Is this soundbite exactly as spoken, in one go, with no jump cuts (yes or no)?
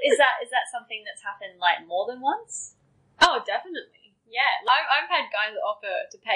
no